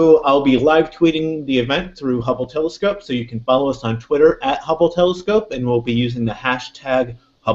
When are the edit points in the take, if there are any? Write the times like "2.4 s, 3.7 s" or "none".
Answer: 1.2 s